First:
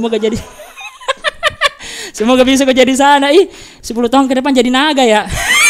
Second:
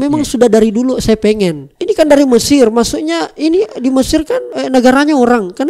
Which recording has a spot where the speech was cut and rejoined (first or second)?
second